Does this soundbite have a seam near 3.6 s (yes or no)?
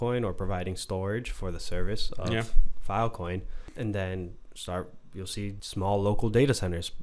yes